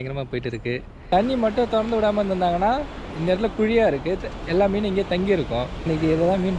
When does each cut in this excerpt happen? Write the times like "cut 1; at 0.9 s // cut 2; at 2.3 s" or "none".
cut 1; at 1.0 s // cut 2; at 5.9 s